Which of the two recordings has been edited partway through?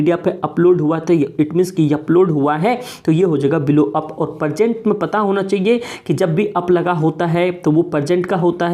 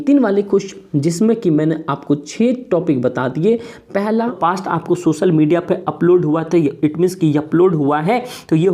second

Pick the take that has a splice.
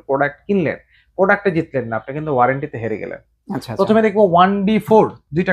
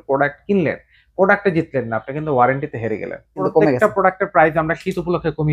second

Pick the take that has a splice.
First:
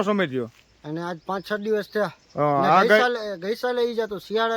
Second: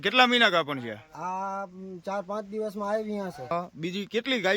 second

